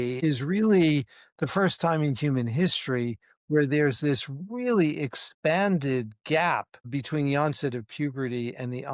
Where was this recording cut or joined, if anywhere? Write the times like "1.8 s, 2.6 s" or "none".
none